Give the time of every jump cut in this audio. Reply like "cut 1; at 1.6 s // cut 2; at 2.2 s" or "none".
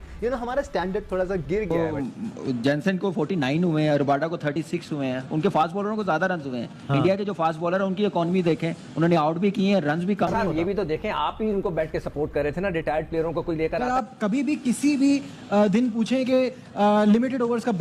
cut 1; at 1.7 s // cut 2; at 10.3 s // cut 3; at 13.8 s